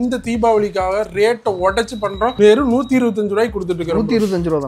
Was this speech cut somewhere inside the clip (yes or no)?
no